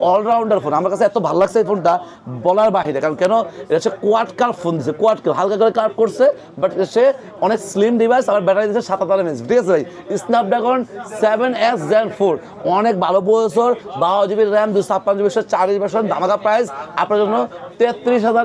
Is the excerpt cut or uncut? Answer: uncut